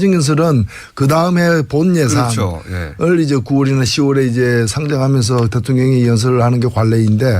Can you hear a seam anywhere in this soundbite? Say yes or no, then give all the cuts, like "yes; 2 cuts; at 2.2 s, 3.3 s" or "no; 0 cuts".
yes; 1 cut; at 5.6 s